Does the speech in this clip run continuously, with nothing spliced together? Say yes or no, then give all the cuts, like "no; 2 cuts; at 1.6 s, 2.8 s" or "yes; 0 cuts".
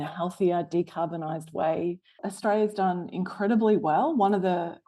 no; 1 cut; at 2.2 s